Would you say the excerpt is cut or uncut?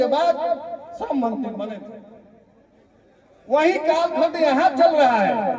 uncut